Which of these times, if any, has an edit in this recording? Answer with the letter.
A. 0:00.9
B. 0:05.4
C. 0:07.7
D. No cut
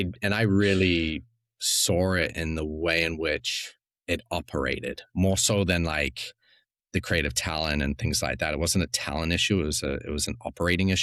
D